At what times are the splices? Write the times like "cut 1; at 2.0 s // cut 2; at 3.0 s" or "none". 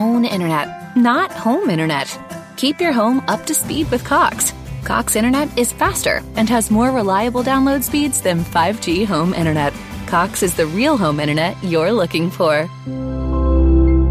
none